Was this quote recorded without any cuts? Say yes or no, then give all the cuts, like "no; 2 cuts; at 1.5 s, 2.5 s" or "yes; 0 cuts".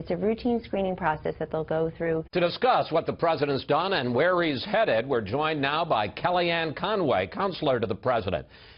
yes; 0 cuts